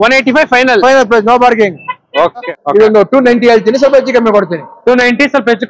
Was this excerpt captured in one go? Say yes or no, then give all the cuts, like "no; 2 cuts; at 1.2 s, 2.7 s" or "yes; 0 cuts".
no; 1 cut; at 2.5 s